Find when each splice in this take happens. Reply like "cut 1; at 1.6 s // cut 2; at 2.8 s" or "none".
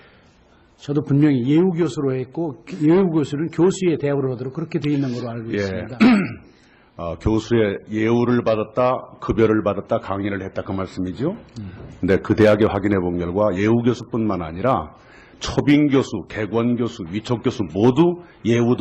cut 1; at 17.5 s